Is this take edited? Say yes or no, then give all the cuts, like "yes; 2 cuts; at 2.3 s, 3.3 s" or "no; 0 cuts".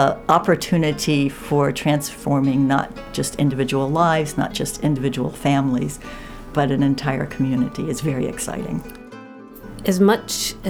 yes; 1 cut; at 9.1 s